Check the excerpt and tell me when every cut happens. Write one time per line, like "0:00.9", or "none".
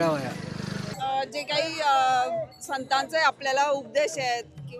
0:00.9